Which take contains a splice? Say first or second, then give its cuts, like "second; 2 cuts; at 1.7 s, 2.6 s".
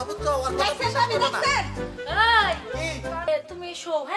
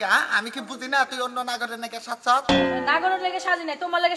first; 1 cut; at 3.3 s